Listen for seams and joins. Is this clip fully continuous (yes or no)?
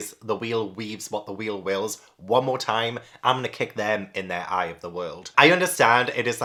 yes